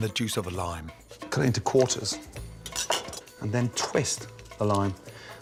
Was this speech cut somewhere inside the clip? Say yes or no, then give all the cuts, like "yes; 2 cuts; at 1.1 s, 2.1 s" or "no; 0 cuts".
no; 0 cuts